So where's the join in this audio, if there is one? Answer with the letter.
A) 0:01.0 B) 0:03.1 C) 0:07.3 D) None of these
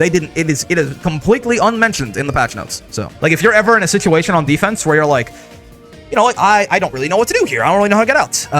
B